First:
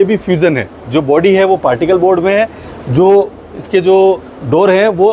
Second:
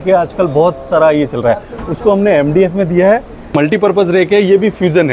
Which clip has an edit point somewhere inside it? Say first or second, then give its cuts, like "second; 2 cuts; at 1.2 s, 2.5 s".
second; 1 cut; at 3.5 s